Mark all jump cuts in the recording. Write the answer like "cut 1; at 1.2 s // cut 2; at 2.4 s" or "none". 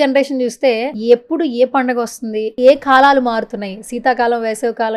cut 1; at 0.9 s // cut 2; at 2.5 s